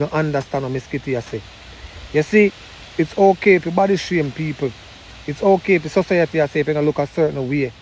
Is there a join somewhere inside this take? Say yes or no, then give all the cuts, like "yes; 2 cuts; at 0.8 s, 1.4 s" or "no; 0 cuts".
no; 0 cuts